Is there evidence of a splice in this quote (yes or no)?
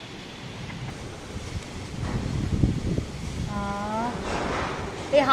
yes